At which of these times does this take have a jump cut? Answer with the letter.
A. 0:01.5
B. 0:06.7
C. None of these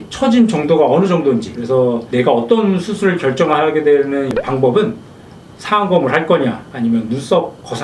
C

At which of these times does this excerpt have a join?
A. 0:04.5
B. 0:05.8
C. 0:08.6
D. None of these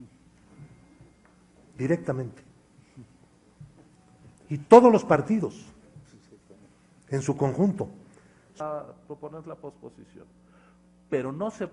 C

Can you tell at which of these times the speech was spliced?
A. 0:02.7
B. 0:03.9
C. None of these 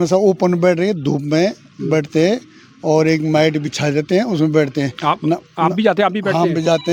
C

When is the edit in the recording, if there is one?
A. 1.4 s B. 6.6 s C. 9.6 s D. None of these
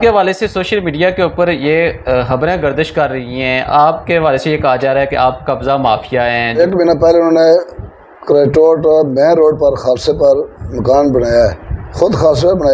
B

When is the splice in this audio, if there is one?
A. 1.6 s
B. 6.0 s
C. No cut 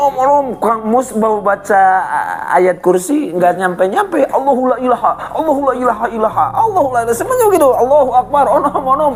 C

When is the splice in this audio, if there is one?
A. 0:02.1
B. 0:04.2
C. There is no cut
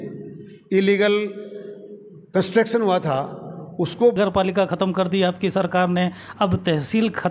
B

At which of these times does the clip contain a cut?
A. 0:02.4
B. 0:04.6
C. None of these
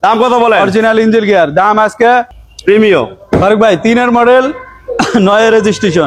A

